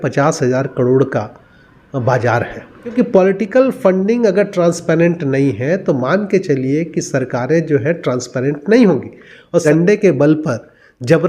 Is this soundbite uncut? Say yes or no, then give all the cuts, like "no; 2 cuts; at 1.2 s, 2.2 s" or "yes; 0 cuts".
no; 2 cuts; at 2.9 s, 9.6 s